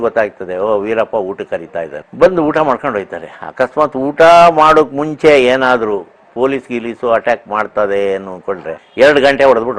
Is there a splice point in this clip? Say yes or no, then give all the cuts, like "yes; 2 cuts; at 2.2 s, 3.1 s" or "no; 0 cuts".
yes; 2 cuts; at 2.0 s, 8.8 s